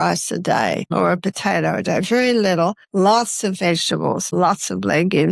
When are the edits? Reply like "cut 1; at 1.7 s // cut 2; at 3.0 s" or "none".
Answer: cut 1; at 0.9 s // cut 2; at 2.8 s // cut 3; at 4.3 s